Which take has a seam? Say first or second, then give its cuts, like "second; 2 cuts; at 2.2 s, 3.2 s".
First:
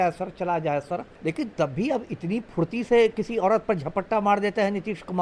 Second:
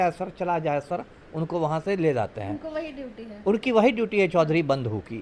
first; 1 cut; at 1.1 s